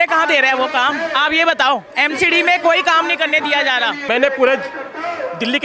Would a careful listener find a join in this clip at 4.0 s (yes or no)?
yes